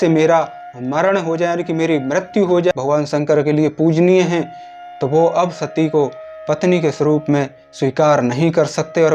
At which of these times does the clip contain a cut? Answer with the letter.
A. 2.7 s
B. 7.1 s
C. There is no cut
A